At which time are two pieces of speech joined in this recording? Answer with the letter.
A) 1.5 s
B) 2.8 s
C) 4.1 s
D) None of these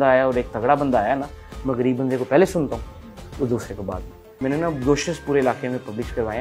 C